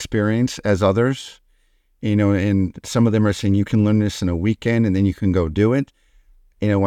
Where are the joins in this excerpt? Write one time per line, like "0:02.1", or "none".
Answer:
none